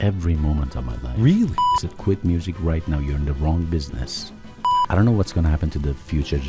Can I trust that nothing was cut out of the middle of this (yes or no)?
no